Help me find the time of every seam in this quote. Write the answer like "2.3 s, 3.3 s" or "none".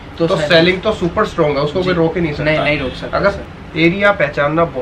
3.4 s